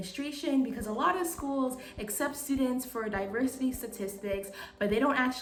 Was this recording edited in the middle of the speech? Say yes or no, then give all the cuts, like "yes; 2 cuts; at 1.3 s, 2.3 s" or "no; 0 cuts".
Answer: no; 0 cuts